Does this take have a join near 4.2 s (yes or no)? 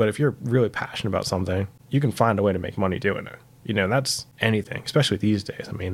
yes